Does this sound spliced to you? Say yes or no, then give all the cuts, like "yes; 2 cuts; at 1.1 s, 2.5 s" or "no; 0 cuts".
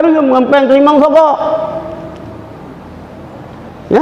no; 0 cuts